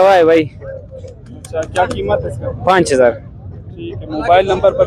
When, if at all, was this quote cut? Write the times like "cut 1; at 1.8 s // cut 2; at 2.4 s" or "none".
none